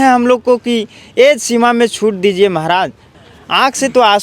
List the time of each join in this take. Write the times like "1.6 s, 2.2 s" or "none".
3.0 s